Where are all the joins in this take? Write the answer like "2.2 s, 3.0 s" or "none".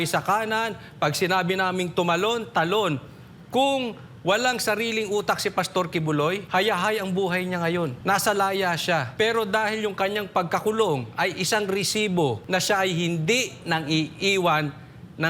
6.4 s, 8.0 s, 9.1 s, 12.4 s